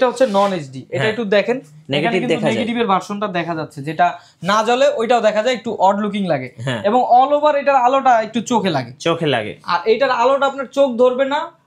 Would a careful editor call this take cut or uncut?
uncut